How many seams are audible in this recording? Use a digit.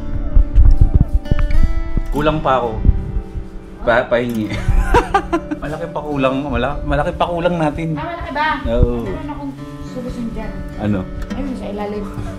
0